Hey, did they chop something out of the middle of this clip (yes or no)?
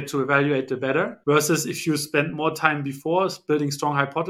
no